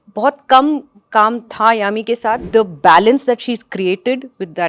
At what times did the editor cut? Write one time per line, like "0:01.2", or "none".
0:02.4